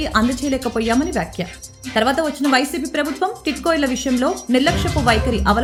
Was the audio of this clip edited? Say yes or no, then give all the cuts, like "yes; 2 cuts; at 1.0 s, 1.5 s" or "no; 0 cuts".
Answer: no; 0 cuts